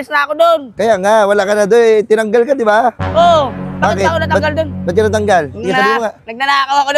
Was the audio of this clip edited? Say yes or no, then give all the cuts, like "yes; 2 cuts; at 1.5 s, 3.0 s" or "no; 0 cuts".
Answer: no; 0 cuts